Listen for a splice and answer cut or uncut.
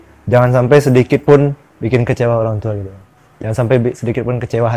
uncut